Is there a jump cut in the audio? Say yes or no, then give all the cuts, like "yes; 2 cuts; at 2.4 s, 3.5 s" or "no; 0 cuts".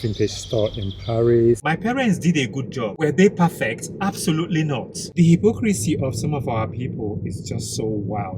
yes; 2 cuts; at 1.6 s, 5.1 s